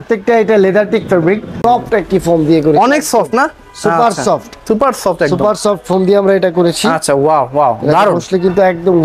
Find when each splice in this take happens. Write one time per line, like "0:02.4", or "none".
0:01.6